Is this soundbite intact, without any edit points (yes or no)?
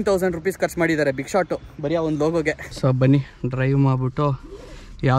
no